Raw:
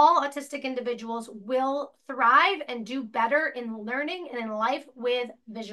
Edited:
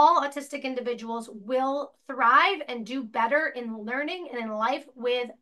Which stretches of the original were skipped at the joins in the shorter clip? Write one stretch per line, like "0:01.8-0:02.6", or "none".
none